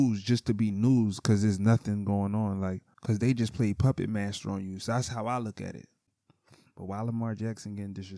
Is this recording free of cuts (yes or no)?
no